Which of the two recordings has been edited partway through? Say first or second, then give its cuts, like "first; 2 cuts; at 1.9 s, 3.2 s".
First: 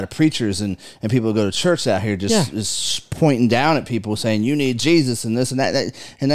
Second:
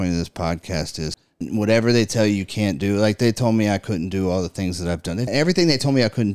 second; 2 cuts; at 1.4 s, 5.3 s